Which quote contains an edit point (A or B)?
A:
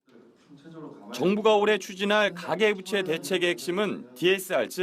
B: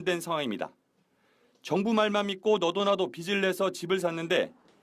B